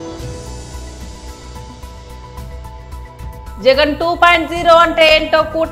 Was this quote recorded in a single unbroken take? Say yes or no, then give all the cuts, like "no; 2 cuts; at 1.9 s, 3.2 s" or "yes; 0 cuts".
yes; 0 cuts